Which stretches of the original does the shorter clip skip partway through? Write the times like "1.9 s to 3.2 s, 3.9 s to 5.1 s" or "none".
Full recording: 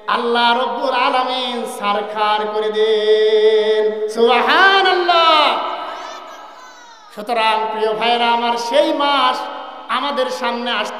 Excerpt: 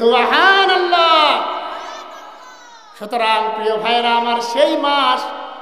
none